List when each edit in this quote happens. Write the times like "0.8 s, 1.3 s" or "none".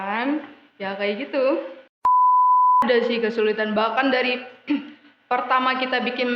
1.9 s, 2.8 s